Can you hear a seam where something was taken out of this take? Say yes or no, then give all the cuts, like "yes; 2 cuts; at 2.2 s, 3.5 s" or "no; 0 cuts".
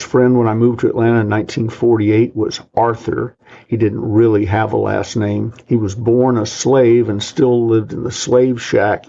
no; 0 cuts